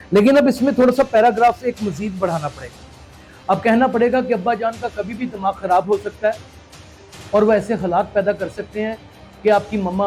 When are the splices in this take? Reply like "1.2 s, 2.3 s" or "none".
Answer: none